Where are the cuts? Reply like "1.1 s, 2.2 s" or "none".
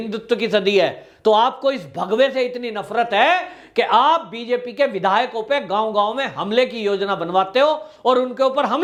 none